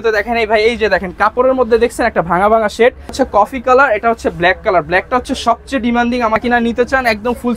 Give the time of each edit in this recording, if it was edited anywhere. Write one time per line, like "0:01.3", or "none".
0:03.1
0:06.4